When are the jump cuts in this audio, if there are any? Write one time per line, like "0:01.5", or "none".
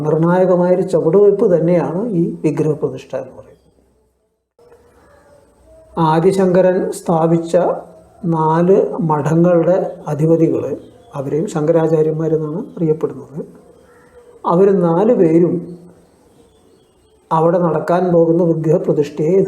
0:04.6